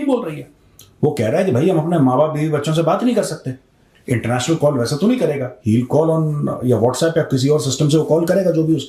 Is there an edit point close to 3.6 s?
no; 0 cuts

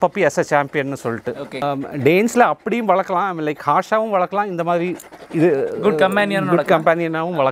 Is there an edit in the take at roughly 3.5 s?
no; 1 cut; at 1.6 s

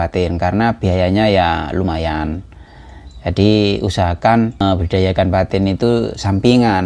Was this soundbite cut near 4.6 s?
yes; 1 cut; at 4.6 s

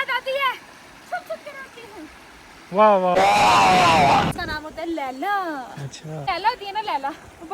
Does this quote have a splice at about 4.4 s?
yes; 2 cuts; at 4.4 s, 6.2 s

